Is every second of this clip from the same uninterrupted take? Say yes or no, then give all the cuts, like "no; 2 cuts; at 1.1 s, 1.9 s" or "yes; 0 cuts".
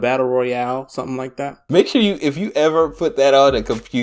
no; 1 cut; at 1.6 s